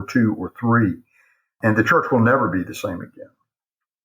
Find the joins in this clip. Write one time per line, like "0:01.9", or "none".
0:01.6